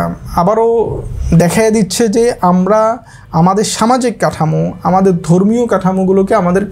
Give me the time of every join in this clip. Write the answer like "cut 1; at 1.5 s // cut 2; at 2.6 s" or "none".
none